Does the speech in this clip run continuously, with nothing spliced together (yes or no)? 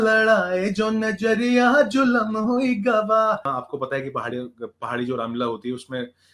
no